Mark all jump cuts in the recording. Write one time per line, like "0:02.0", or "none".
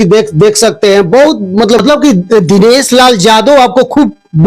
0:01.4